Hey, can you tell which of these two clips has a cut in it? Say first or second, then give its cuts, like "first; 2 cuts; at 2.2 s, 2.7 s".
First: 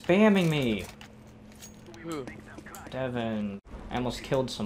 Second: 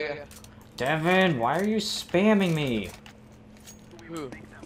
first; 1 cut; at 3.6 s